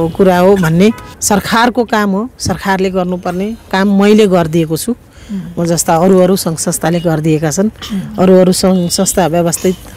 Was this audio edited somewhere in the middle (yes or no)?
yes